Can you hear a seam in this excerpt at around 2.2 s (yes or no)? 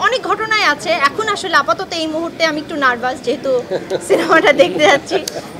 no